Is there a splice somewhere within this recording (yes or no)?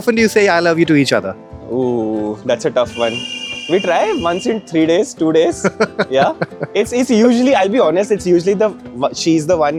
no